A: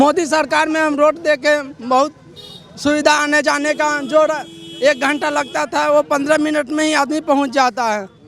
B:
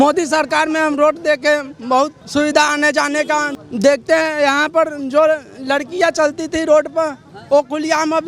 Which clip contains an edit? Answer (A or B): B